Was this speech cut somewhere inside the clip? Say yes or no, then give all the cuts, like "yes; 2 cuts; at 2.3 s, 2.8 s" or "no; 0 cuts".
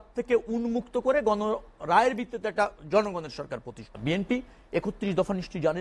yes; 1 cut; at 3.8 s